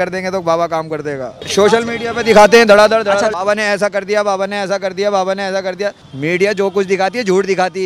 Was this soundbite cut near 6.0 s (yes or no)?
yes